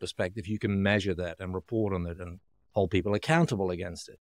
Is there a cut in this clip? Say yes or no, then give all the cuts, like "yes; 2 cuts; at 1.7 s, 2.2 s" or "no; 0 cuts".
no; 0 cuts